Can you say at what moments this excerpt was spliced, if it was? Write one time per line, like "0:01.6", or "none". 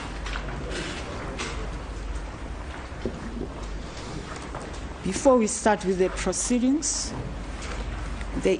none